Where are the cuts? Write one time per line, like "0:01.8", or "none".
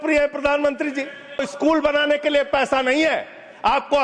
0:01.5